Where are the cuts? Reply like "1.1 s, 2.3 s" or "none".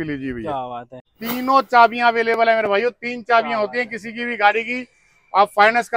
1.2 s